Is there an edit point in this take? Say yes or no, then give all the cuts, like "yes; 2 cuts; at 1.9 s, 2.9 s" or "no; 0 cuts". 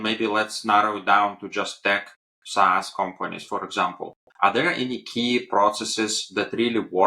no; 0 cuts